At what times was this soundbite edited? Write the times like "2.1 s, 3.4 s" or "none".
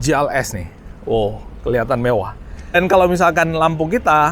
2.8 s